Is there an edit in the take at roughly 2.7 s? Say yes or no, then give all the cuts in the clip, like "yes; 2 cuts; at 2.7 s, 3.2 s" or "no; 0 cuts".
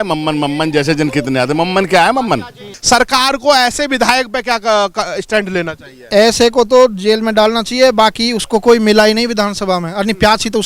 yes; 1 cut; at 2.7 s